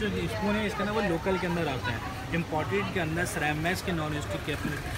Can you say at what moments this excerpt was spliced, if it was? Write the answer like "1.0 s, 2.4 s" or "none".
none